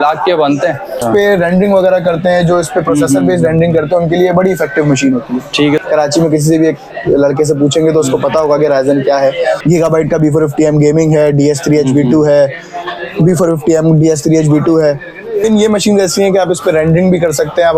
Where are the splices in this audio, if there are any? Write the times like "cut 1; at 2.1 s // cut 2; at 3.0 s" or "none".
cut 1; at 1.0 s // cut 2; at 5.8 s // cut 3; at 9.6 s // cut 4; at 15.4 s